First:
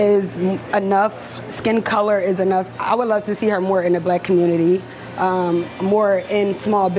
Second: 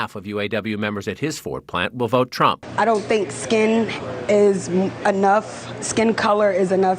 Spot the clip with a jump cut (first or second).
second